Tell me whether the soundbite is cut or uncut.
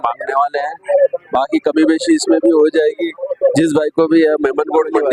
uncut